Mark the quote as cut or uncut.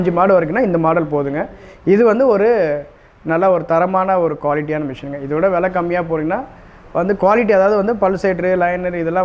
uncut